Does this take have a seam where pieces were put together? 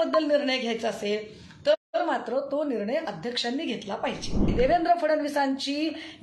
yes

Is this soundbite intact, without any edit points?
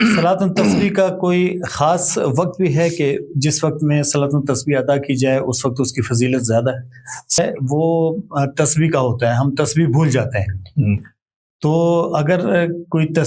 no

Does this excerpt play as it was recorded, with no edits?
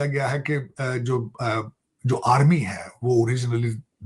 yes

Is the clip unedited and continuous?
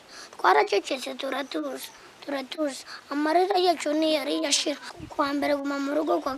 no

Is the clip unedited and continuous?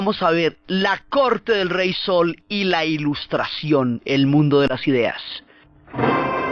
yes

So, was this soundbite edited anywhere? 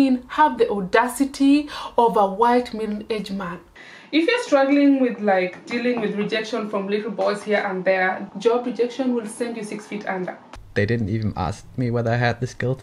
yes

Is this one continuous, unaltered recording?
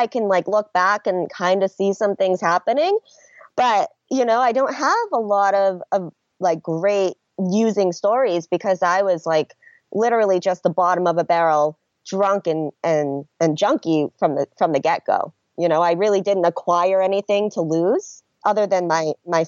no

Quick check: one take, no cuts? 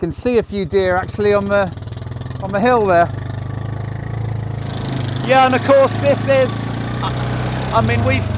yes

